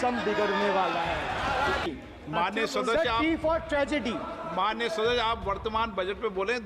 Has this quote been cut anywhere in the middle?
yes; 1 cut; at 1.9 s

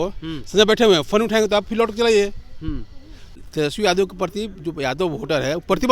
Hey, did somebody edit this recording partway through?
yes; 1 cut; at 3.4 s

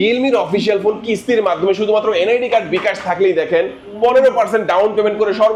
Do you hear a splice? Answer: no; 0 cuts

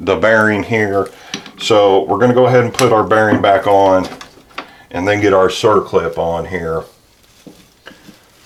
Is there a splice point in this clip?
no; 0 cuts

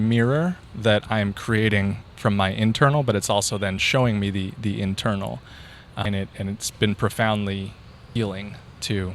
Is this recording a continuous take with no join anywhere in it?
no; 2 cuts; at 6.0 s, 8.0 s

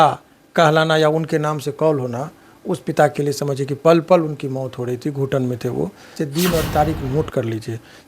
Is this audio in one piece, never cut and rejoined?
no; 1 cut; at 6.2 s

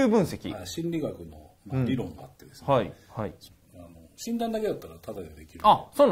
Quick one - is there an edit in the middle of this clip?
yes; 1 cut; at 3.5 s

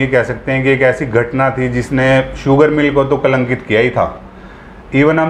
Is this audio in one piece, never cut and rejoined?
yes; 0 cuts

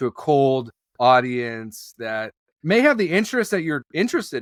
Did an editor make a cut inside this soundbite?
no; 0 cuts

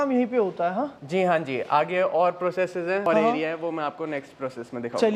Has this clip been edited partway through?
no; 0 cuts

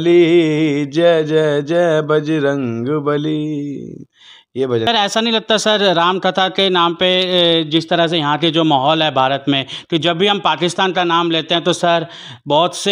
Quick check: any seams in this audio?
yes; 1 cut; at 4.9 s

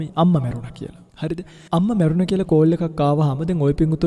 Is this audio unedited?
no; 1 cut; at 1.4 s

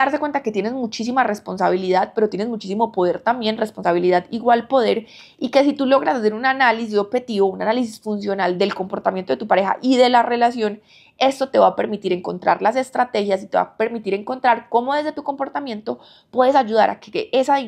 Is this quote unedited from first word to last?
yes; 0 cuts

